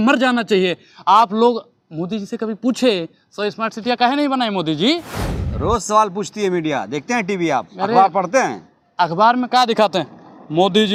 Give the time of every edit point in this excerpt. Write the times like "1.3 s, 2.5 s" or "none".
none